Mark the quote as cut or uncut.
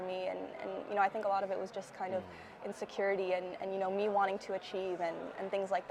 uncut